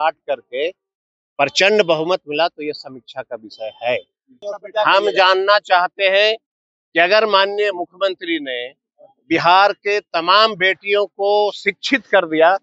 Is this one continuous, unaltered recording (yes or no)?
no